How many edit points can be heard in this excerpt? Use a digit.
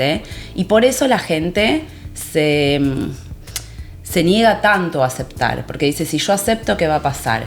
0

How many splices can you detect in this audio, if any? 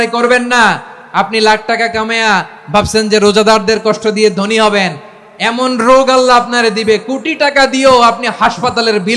0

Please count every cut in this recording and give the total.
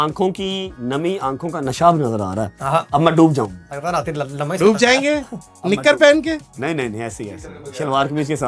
0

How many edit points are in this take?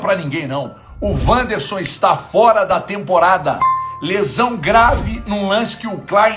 0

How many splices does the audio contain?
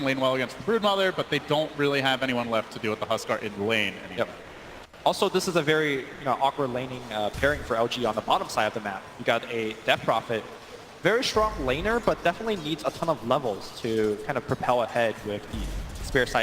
1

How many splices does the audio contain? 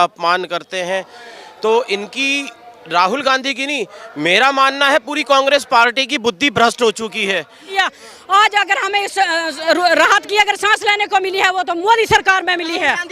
1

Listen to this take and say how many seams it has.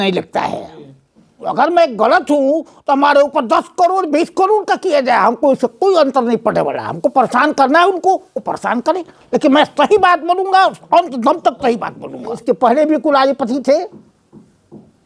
2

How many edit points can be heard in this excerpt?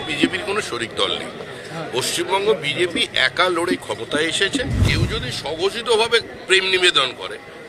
1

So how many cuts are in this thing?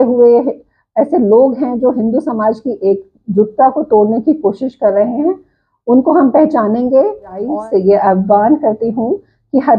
1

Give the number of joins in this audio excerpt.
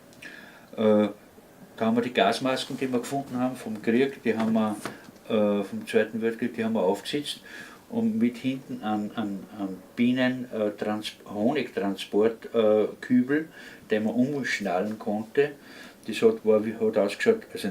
1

